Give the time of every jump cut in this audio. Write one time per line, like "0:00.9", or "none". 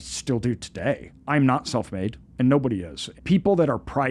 0:01.1
0:03.0